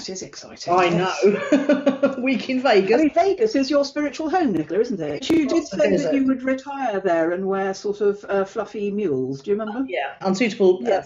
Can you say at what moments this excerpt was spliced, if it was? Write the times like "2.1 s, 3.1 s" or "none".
5.3 s, 10.2 s